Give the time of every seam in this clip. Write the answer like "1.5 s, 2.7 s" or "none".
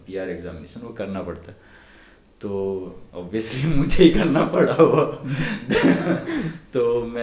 none

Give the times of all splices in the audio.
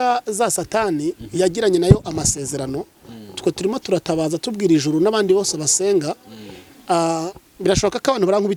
none

